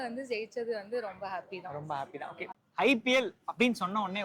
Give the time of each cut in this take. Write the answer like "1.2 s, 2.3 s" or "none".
2.5 s